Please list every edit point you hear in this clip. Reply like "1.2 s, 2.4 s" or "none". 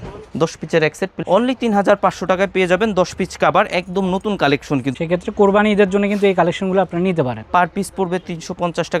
1.2 s, 4.9 s, 7.4 s